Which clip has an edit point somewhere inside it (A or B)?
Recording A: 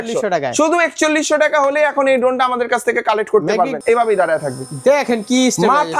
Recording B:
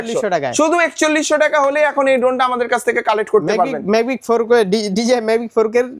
A